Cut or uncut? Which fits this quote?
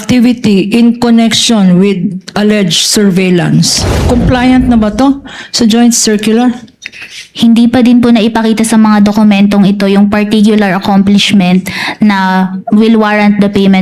cut